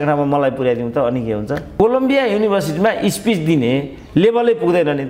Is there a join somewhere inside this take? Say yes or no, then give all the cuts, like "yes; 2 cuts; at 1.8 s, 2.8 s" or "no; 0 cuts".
yes; 1 cut; at 1.7 s